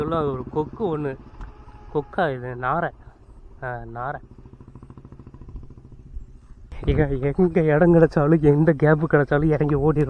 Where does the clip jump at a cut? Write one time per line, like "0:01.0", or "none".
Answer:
0:06.7